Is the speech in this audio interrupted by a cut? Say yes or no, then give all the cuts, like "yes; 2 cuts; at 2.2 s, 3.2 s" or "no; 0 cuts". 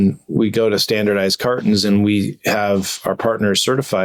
no; 0 cuts